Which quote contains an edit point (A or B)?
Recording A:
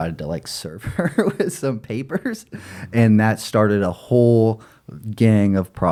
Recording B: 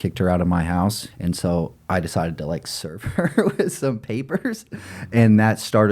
B